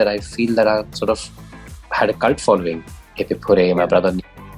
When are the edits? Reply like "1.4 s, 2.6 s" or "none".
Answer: none